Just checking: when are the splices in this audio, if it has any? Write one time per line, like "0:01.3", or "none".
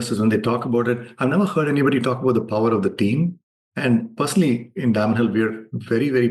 0:03.9

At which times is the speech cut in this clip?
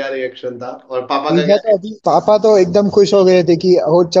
0:01.9

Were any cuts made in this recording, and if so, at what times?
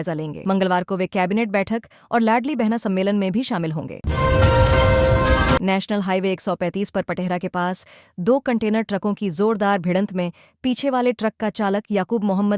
0:04.0
0:05.6

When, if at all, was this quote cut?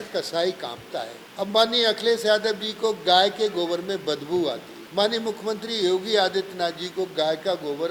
0:01.2
0:04.7

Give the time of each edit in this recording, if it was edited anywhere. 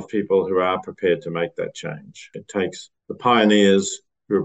0:02.5

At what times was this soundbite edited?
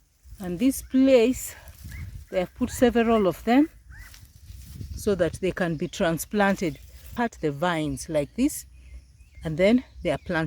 0:07.0

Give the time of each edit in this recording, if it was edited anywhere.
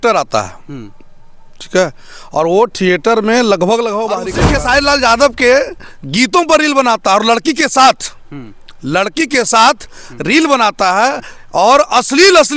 0:04.3

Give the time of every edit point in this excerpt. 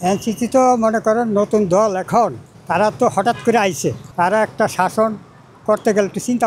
none

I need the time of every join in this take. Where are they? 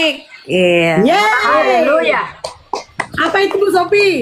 none

